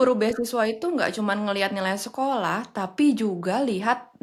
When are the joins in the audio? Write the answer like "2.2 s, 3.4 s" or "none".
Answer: none